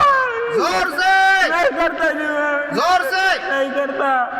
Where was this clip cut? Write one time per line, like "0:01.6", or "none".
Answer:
none